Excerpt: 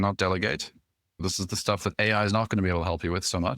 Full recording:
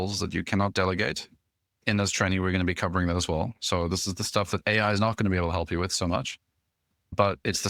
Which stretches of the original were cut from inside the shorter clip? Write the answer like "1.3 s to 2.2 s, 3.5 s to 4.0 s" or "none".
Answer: 1.8 s to 3.9 s